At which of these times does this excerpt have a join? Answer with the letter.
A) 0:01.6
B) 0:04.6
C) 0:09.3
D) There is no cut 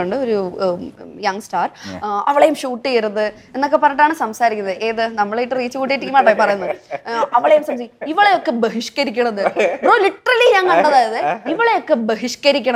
D